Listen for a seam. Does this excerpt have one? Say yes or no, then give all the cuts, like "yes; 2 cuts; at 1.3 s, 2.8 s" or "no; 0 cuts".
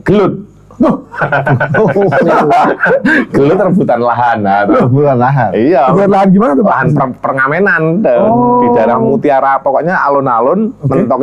no; 0 cuts